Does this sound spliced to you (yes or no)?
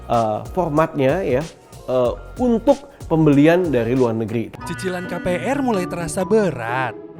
yes